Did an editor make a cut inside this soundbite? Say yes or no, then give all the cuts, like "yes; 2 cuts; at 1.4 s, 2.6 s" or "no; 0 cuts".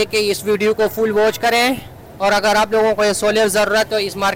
no; 0 cuts